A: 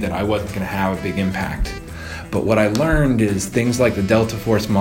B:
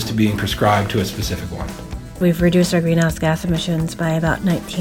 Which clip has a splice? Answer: B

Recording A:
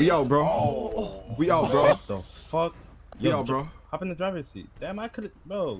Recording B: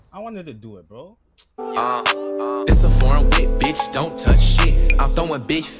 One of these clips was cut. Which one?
B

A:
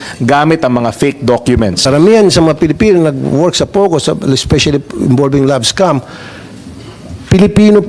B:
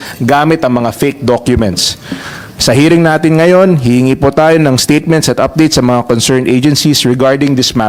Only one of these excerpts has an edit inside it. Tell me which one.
A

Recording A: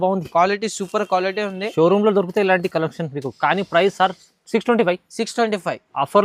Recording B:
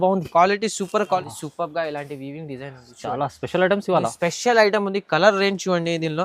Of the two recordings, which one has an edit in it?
B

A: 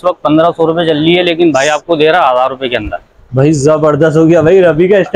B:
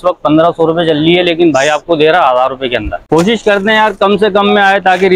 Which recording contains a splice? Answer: B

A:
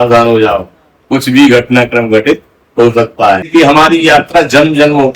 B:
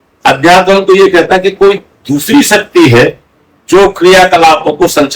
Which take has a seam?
A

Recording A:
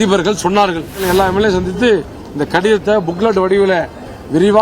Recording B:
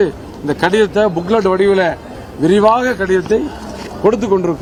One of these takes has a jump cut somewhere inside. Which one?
A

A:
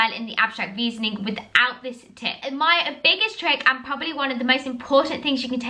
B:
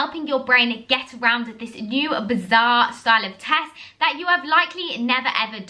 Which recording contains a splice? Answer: A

